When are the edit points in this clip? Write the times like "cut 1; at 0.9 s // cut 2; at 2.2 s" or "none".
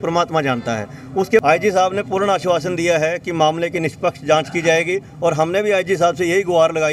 cut 1; at 1.4 s